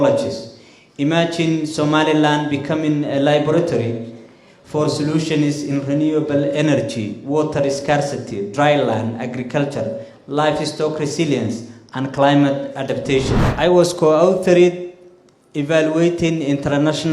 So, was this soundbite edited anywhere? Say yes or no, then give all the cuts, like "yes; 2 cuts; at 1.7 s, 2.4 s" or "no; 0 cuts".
yes; 1 cut; at 13.4 s